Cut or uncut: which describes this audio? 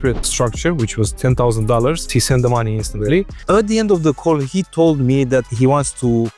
uncut